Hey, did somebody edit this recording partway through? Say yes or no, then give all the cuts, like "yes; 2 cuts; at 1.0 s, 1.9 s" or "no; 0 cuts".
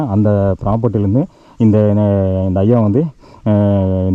no; 0 cuts